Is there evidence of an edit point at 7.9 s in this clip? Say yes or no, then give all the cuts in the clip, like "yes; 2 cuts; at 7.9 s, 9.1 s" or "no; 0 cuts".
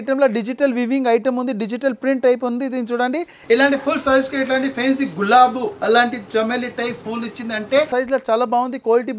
yes; 2 cuts; at 3.3 s, 7.9 s